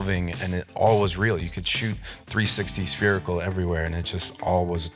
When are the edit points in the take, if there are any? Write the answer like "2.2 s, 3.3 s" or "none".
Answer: none